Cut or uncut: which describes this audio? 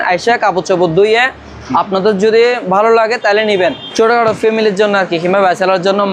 cut